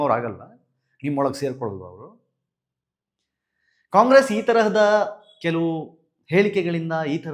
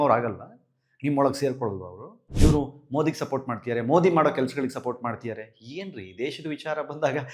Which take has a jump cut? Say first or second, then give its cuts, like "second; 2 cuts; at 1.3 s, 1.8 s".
second; 1 cut; at 2.2 s